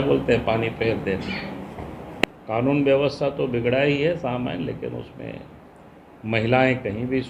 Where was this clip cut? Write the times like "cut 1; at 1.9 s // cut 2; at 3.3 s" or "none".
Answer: cut 1; at 2.2 s